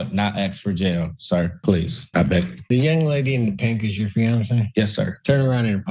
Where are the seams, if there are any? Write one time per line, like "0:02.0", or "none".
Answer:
0:01.5